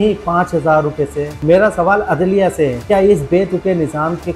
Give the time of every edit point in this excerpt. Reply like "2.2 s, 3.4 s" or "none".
1.3 s